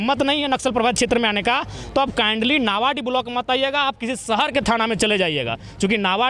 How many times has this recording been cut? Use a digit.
0